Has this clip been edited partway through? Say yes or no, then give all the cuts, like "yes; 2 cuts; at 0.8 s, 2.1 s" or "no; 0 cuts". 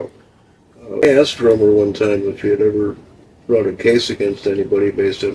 yes; 1 cut; at 1.1 s